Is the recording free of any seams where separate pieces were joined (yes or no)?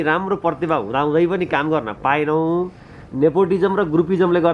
yes